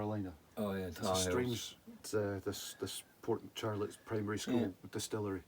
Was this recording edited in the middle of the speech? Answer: yes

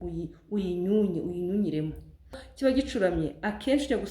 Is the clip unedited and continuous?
no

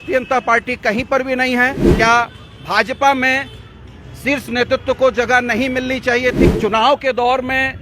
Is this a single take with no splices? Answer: no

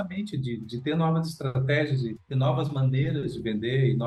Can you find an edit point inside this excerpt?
no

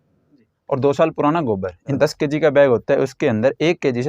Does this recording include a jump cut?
yes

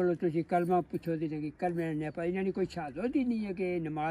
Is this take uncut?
yes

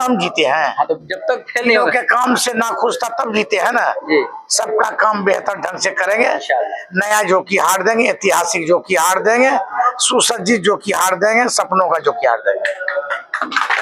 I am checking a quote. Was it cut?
no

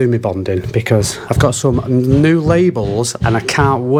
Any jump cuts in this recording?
no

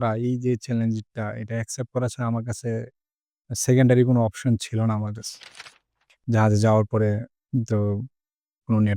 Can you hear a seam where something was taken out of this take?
yes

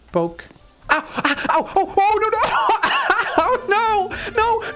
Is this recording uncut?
yes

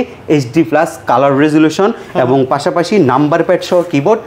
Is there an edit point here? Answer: no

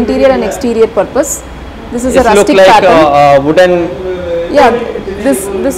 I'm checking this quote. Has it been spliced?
no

